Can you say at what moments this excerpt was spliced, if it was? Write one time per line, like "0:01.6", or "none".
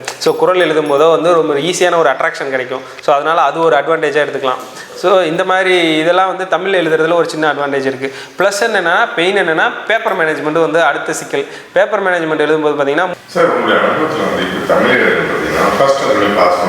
0:13.1